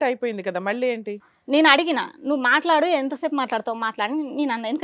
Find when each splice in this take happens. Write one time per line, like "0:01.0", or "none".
0:01.3